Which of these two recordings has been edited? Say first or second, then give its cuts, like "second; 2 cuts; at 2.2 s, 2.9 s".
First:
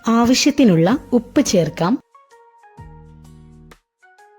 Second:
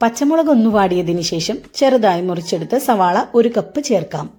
first; 1 cut; at 2.1 s